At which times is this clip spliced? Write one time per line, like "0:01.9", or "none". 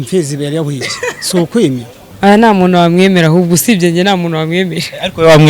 0:02.0